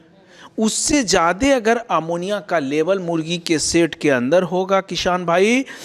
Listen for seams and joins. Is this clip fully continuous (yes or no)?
yes